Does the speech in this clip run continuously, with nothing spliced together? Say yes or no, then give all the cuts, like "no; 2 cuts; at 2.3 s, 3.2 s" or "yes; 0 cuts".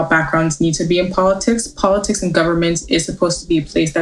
yes; 0 cuts